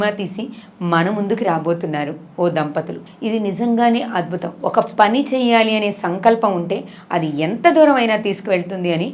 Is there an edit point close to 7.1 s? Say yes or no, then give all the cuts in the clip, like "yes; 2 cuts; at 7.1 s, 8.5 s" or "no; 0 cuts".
no; 1 cut; at 3.0 s